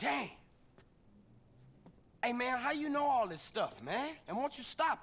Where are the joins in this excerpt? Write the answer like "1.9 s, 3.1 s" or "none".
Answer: none